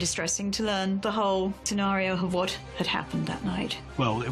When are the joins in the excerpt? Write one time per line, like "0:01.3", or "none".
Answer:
0:02.9